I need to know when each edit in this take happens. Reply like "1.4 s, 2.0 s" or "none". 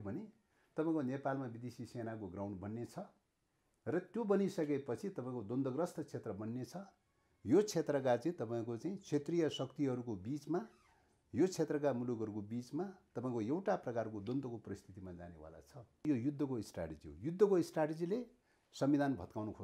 16.0 s